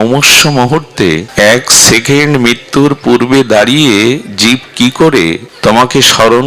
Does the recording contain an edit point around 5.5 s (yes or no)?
yes